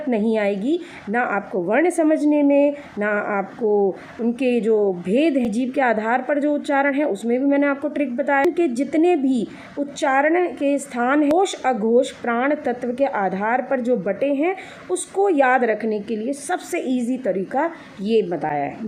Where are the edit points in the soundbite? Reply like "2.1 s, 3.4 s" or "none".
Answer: 5.5 s, 8.4 s, 11.3 s